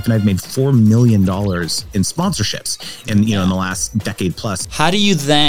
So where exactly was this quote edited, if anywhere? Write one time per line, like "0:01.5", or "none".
0:02.1
0:04.5